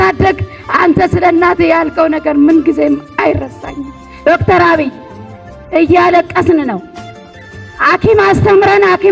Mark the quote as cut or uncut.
uncut